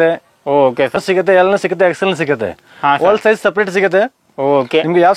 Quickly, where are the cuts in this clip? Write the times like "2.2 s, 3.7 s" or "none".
0.9 s